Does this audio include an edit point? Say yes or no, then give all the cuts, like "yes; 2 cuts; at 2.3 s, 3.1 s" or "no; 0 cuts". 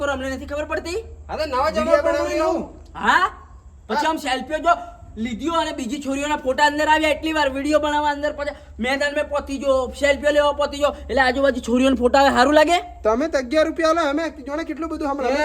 no; 0 cuts